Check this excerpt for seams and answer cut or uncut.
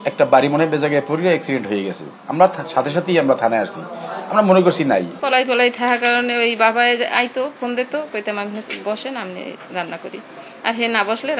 uncut